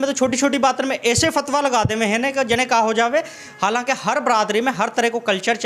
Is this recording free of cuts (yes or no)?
yes